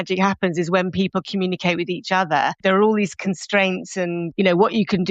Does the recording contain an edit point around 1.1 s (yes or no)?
no